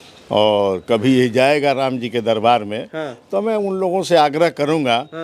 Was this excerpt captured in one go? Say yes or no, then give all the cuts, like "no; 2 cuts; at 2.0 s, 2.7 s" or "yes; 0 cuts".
yes; 0 cuts